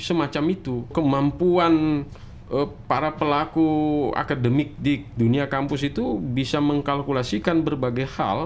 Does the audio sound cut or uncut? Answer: cut